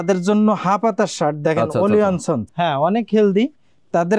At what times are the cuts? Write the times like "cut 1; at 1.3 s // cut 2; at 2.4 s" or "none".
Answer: cut 1; at 2.5 s

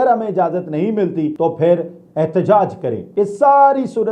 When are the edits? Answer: cut 1; at 1.3 s // cut 2; at 3.0 s

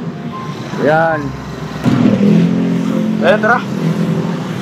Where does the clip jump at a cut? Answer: cut 1; at 1.8 s

